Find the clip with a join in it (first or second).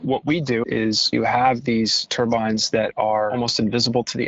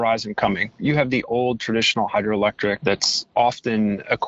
first